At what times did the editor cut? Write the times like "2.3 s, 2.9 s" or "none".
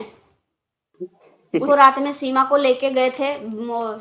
1.6 s